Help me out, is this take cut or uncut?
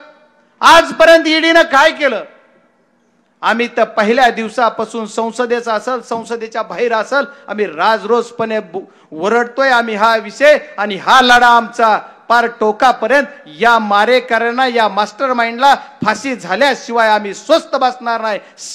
uncut